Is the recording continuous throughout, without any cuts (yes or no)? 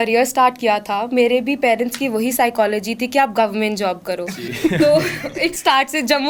yes